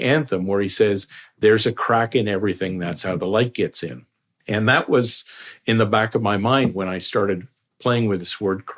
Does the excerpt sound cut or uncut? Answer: uncut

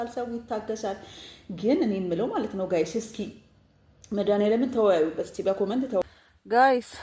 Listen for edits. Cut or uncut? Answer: cut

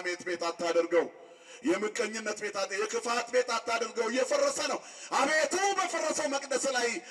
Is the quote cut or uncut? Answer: uncut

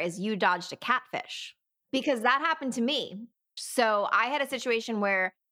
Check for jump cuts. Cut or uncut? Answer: cut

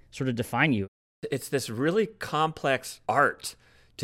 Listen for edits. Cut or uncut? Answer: cut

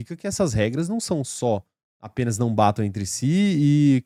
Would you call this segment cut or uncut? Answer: uncut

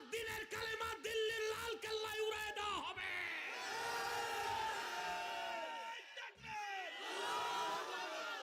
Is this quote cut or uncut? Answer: uncut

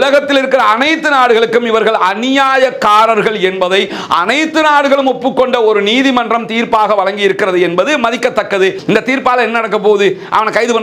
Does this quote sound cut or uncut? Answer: cut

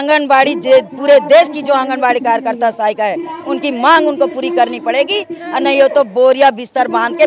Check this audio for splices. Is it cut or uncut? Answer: uncut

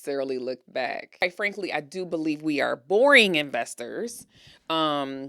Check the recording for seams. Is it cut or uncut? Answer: cut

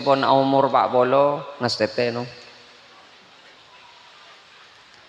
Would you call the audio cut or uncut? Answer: uncut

